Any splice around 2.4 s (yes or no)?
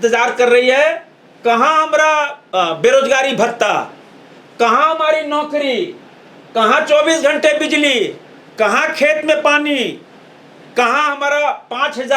yes